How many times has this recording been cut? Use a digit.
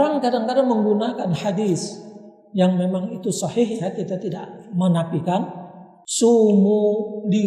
0